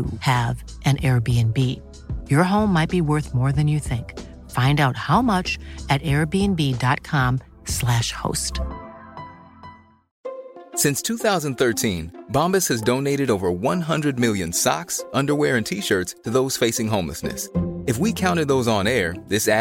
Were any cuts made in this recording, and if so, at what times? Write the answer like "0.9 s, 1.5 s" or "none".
none

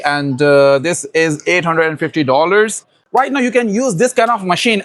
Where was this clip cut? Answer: 2.9 s

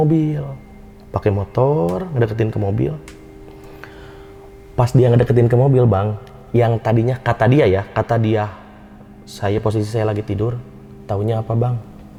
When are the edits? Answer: none

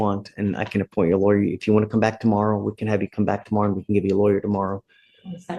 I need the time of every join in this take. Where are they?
none

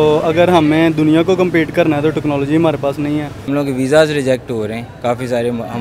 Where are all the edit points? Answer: 3.4 s

